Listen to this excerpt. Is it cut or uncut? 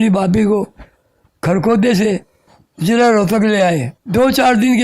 cut